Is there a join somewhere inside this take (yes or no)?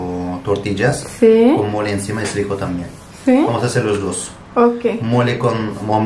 no